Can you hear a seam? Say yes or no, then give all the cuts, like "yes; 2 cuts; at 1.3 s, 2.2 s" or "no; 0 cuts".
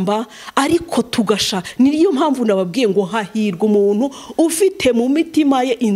no; 0 cuts